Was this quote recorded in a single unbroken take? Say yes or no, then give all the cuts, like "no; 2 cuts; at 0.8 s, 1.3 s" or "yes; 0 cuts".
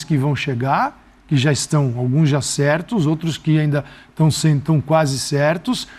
yes; 0 cuts